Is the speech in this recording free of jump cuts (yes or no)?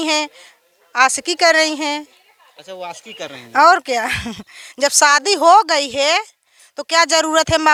yes